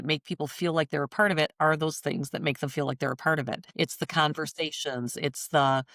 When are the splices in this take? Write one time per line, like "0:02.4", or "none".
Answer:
0:03.7